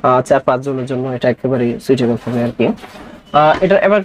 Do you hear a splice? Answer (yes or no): no